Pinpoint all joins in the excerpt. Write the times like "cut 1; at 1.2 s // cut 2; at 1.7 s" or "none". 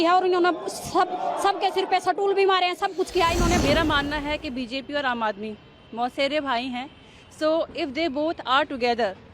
cut 1; at 3.6 s